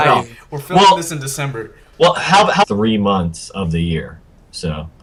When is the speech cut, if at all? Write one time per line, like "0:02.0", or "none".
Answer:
none